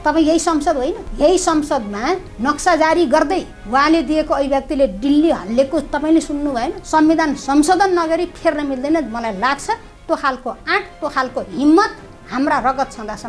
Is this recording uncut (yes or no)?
no